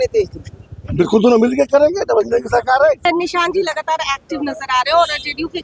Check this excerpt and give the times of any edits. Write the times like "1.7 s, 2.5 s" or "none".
3.0 s